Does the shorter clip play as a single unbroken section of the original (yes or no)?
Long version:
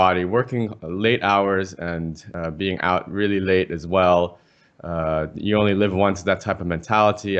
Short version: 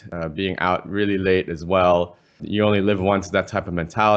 no